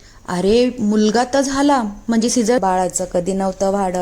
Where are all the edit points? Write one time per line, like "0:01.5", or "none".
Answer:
0:02.6